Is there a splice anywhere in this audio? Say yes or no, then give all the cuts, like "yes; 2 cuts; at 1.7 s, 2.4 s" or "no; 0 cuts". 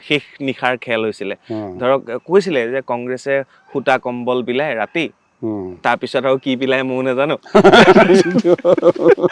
no; 0 cuts